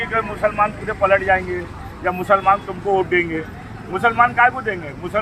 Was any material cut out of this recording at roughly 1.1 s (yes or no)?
no